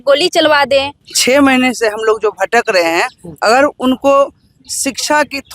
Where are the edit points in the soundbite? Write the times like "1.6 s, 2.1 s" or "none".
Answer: 1.1 s